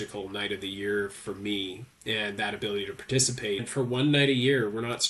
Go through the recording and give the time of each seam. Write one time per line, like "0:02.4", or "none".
0:03.7